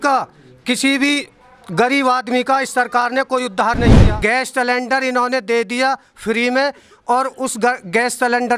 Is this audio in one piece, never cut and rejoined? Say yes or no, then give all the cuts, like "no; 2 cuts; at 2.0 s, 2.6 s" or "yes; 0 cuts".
no; 1 cut; at 4.0 s